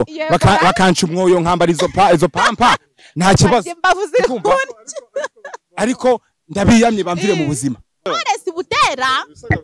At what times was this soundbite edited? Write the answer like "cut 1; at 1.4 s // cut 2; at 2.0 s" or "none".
cut 1; at 8.1 s